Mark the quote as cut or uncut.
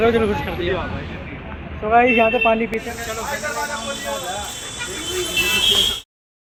uncut